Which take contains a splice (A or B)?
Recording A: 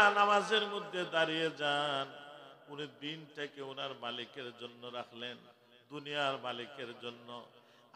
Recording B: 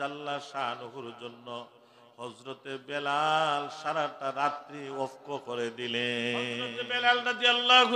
B